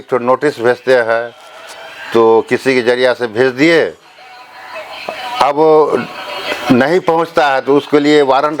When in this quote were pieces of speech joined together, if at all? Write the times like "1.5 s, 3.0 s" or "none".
none